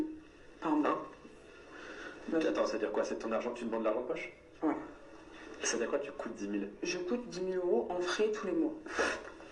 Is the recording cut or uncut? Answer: uncut